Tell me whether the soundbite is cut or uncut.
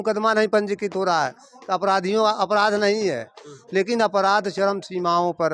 uncut